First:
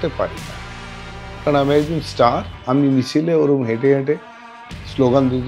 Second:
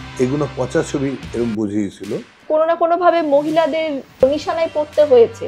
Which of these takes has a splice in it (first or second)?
second